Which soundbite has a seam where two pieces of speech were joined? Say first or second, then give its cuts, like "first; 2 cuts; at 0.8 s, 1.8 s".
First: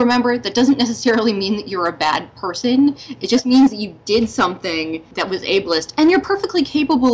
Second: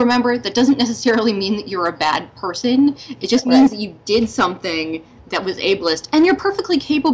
first; 1 cut; at 5.1 s